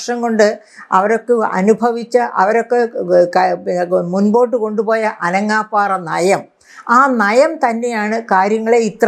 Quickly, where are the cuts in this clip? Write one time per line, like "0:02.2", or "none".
none